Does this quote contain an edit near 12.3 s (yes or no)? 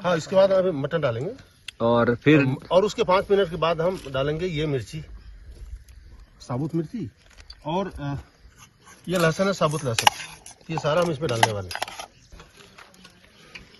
yes